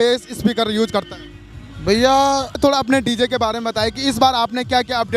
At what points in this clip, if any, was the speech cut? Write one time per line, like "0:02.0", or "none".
0:02.6